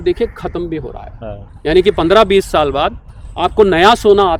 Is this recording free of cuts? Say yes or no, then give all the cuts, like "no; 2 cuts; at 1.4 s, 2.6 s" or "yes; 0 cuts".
yes; 0 cuts